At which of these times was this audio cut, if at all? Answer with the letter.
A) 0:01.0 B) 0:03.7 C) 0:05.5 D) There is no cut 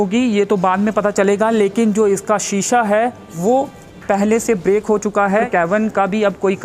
C